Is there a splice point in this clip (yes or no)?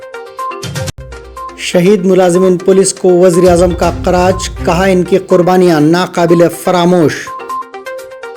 yes